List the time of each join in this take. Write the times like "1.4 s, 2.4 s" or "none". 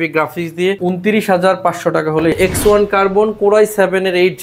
0.8 s, 2.3 s